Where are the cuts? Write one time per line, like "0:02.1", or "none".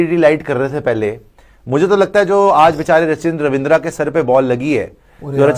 none